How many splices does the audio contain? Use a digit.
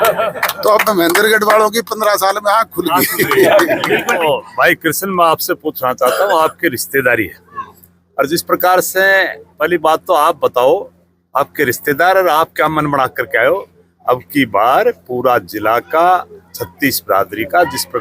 1